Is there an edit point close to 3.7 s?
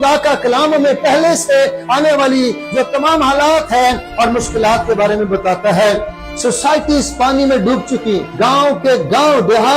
no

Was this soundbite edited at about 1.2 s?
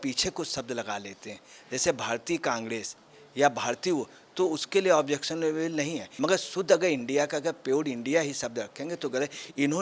no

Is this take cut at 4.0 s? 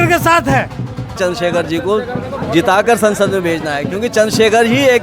no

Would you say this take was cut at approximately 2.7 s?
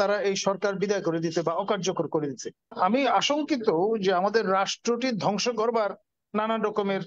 yes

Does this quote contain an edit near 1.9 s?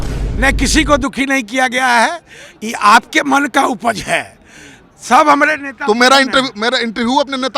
no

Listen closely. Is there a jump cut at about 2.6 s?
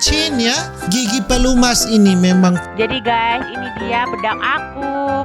yes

